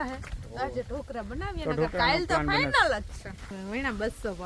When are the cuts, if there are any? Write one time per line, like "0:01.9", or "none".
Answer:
0:03.5